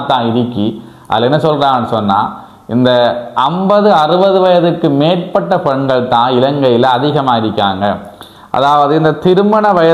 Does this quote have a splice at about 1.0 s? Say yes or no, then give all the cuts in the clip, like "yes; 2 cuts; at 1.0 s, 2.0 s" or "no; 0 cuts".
no; 0 cuts